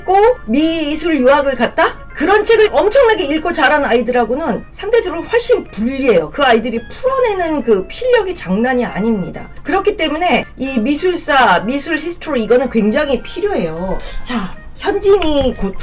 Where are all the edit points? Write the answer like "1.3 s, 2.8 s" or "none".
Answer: none